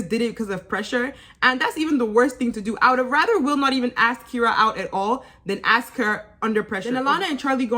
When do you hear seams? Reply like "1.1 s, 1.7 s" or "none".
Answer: 6.8 s